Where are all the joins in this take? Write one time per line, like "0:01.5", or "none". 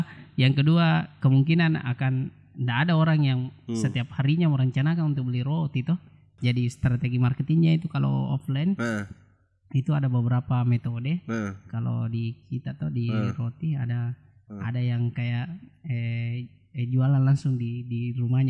0:06.3